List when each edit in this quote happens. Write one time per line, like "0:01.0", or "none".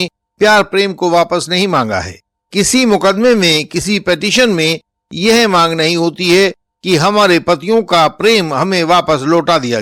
none